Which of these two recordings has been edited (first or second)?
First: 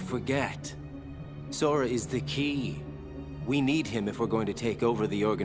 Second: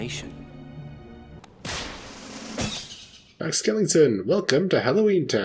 second